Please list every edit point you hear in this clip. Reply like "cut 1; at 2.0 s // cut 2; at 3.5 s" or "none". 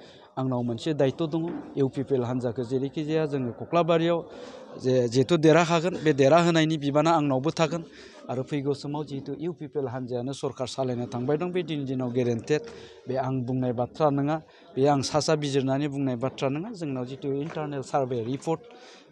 none